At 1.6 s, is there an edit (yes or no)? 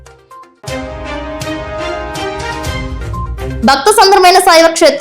no